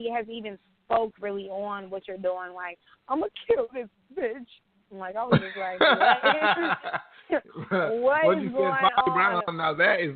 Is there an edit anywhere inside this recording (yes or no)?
no